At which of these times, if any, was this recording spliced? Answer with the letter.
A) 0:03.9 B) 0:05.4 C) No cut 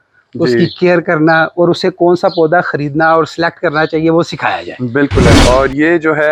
B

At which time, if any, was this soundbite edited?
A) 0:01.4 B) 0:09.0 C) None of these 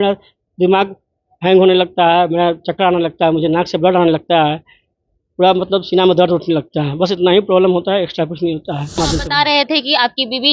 B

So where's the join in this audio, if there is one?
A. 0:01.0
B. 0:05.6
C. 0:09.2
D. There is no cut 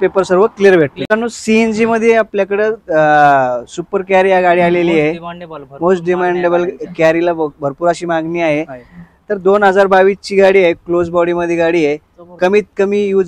A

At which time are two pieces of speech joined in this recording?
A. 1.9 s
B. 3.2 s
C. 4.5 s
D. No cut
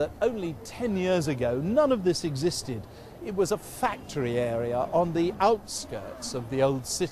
A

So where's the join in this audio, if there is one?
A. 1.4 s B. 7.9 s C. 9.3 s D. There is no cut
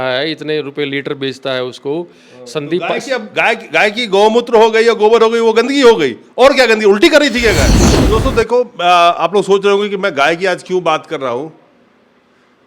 B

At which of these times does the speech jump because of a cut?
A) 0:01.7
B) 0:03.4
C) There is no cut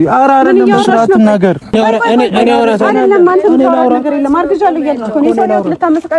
A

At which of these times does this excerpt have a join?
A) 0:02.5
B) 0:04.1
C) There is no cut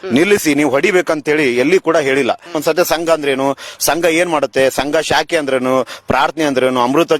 A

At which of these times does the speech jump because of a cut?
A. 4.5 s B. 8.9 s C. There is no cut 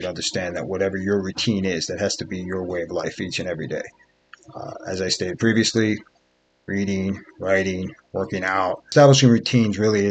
B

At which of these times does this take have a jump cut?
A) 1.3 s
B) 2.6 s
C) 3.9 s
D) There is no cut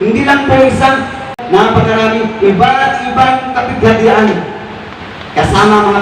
A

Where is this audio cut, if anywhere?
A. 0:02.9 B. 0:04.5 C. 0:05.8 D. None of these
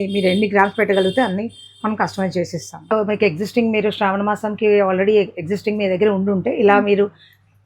A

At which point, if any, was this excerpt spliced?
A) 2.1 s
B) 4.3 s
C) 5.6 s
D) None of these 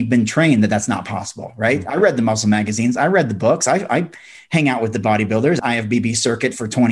C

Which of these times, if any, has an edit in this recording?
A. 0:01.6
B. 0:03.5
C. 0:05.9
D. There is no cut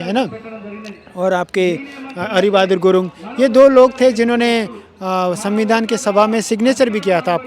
D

